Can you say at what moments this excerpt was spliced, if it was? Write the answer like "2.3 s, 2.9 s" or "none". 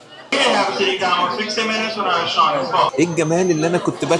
2.9 s